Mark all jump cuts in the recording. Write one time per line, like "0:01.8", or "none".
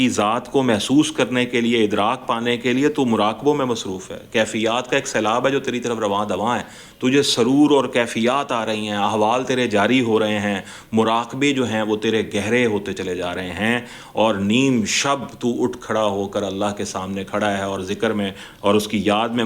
none